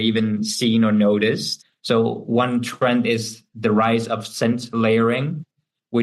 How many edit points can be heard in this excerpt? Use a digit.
1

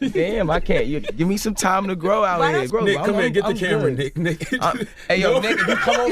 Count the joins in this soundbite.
1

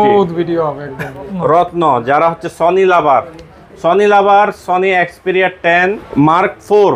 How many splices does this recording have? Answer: 2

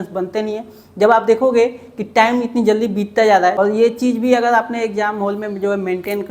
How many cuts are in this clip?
1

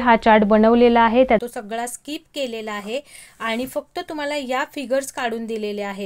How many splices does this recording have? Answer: 1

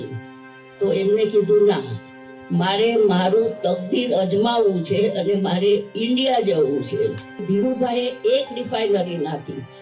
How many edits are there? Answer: 1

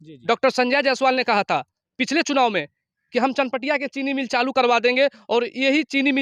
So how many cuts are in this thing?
0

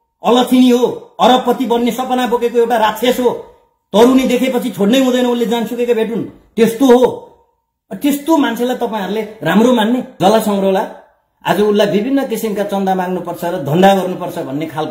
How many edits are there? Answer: 1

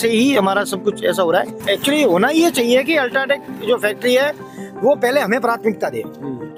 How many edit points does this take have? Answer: 0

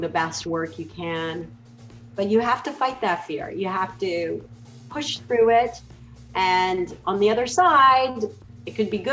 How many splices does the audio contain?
0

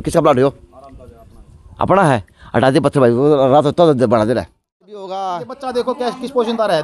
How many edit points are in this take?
1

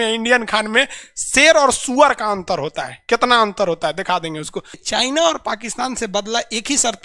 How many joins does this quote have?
1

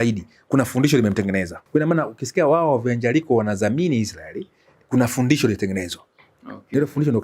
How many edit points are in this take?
1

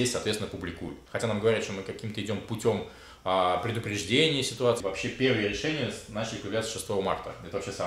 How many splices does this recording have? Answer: 2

